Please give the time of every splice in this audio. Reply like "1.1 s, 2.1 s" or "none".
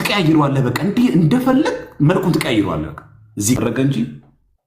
3.6 s